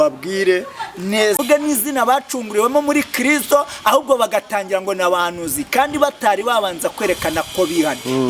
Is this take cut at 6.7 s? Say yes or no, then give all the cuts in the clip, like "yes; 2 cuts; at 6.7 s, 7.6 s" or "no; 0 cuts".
no; 1 cut; at 1.4 s